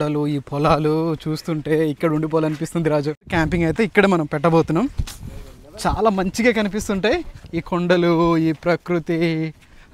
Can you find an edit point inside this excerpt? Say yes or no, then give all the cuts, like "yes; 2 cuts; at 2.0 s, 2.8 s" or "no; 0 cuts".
yes; 1 cut; at 3.2 s